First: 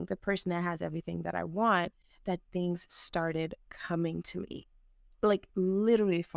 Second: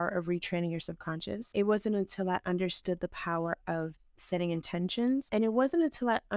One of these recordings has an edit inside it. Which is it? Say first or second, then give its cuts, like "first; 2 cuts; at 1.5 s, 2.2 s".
second; 2 cuts; at 1.4 s, 5.3 s